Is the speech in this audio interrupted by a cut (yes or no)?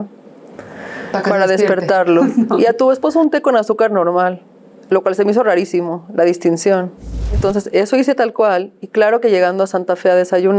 yes